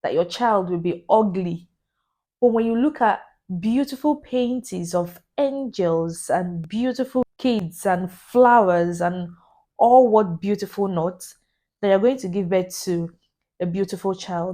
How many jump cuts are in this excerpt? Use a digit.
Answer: 1